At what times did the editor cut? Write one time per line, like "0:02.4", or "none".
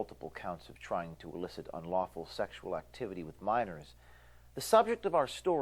0:01.1
0:02.9

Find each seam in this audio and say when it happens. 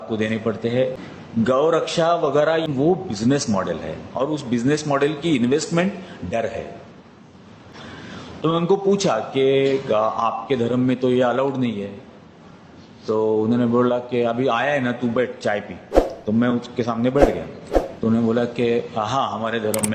0:01.1
0:02.7
0:07.7

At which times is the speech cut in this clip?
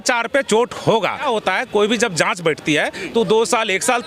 0:01.2

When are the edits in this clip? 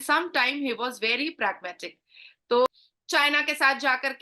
0:02.7

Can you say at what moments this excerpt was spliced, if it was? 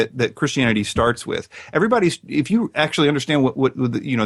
none

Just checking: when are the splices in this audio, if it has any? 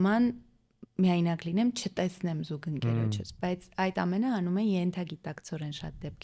none

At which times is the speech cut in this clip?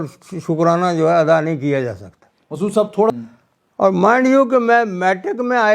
0:03.1

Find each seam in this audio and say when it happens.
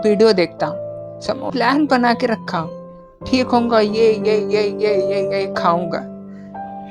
0:01.5

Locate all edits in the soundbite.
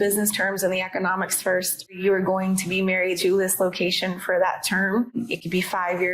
0:01.9
0:03.2
0:05.2

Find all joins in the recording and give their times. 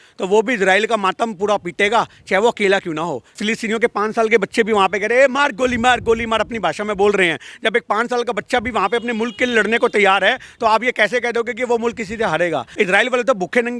0:03.4
0:12.7

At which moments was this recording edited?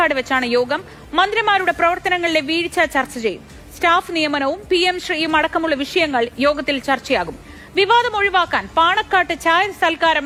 none

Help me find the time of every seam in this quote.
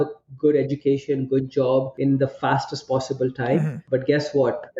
0:01.9
0:03.8

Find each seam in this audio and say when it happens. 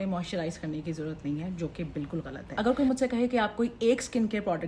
0:02.4

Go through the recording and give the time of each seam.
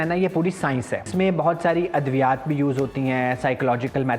0:01.1

